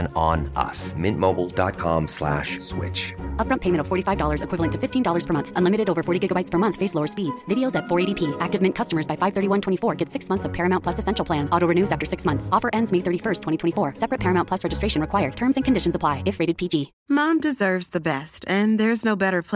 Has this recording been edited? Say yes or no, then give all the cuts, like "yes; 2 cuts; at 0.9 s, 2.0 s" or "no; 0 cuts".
yes; 1 cut; at 16.9 s